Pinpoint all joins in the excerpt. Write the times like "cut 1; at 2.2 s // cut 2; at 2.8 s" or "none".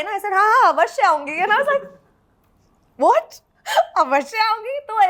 none